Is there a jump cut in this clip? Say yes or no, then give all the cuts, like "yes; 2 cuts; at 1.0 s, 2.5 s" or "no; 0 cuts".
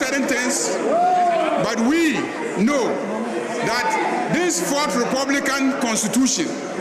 no; 0 cuts